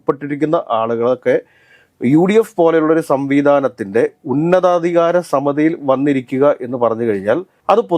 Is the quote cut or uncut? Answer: uncut